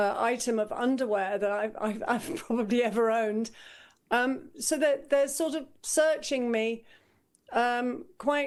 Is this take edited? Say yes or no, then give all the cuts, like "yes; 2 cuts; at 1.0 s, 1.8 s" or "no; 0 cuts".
no; 0 cuts